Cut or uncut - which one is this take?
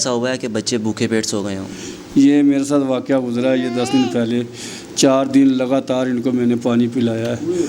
uncut